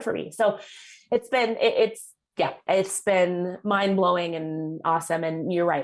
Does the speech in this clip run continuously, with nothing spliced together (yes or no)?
yes